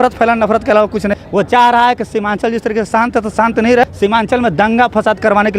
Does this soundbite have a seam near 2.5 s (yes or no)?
no